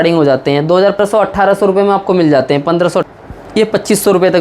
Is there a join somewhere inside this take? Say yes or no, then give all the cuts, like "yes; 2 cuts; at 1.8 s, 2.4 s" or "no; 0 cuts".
yes; 2 cuts; at 1.0 s, 3.1 s